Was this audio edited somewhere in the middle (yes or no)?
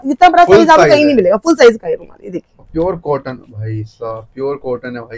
no